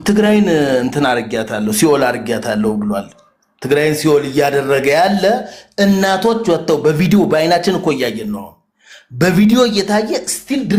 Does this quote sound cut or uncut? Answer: uncut